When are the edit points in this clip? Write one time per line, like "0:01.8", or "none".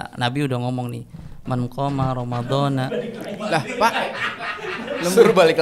none